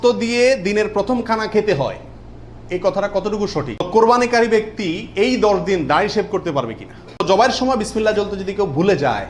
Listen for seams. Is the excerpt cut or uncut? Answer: cut